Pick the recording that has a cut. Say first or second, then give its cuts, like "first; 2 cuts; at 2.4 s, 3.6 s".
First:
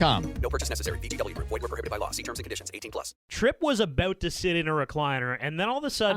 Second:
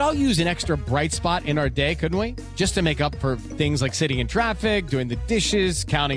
first; 1 cut; at 3.3 s